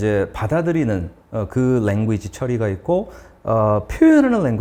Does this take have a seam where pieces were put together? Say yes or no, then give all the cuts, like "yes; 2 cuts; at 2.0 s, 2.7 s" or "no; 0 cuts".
no; 0 cuts